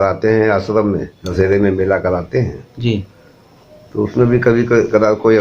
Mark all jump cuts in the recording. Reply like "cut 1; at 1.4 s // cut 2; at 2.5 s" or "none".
cut 1; at 1.2 s